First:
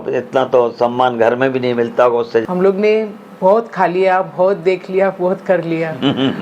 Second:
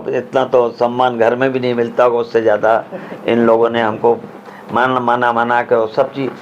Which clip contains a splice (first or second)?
first